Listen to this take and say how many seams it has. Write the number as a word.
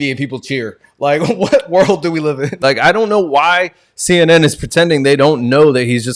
one